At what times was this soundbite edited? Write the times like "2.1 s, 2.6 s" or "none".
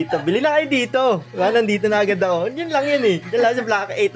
none

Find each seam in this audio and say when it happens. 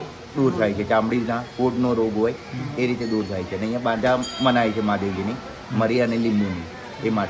none

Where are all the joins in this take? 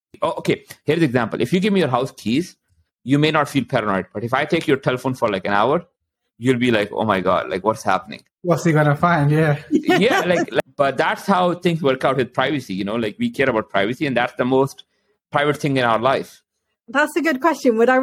10.7 s

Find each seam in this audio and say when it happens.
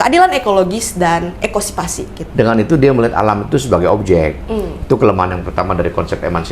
2.2 s

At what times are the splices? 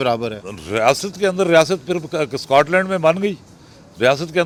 none

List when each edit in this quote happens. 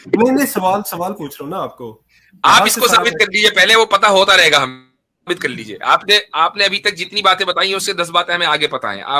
none

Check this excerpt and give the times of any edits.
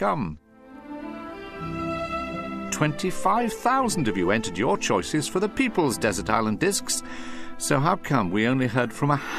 none

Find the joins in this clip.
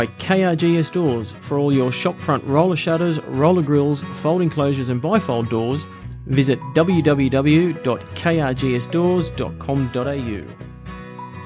10.5 s

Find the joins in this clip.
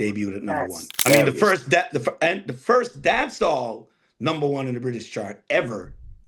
1.0 s

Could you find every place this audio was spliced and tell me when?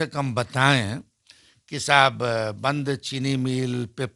none

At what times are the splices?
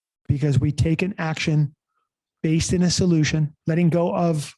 3.6 s

